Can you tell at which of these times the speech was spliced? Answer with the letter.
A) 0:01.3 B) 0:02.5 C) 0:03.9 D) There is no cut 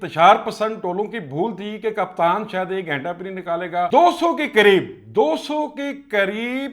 C